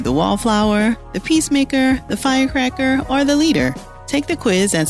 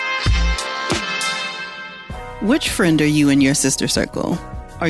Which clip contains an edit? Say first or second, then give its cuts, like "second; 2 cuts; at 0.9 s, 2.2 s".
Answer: second; 1 cut; at 1.5 s